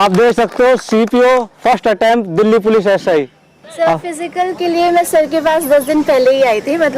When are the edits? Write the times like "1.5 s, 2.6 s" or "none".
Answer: 3.6 s